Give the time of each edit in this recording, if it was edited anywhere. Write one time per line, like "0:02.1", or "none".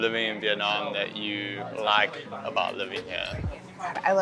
none